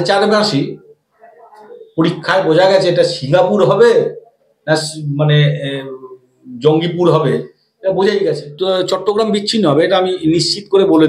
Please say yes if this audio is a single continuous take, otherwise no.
no